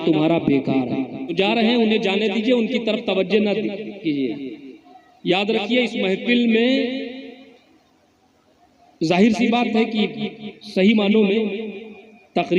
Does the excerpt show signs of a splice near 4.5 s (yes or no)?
no